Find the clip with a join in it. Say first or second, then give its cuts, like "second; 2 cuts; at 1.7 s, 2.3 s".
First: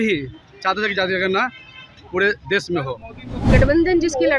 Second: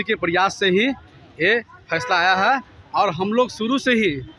first; 1 cut; at 3.5 s